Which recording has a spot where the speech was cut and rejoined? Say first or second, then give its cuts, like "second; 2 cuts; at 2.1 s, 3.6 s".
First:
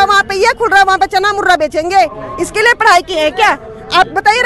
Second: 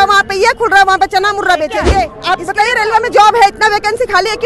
second; 1 cut; at 2.2 s